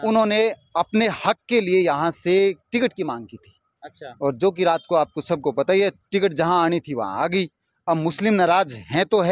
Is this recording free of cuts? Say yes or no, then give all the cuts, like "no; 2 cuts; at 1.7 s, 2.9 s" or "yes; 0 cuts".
yes; 0 cuts